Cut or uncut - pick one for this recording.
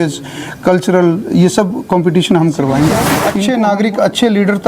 cut